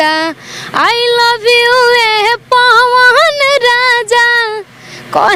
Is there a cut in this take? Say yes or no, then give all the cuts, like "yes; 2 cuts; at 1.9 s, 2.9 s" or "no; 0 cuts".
no; 0 cuts